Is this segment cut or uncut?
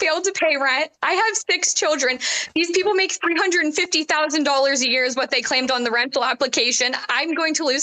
uncut